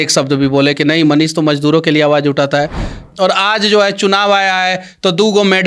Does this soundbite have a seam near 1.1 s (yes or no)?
no